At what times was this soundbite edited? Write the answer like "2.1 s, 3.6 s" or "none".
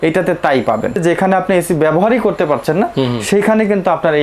1.0 s